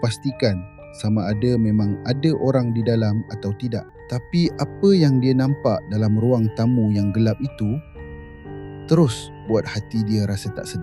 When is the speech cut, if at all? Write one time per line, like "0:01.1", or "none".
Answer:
0:04.0